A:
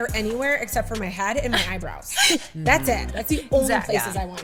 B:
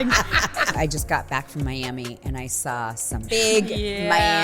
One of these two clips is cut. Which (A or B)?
B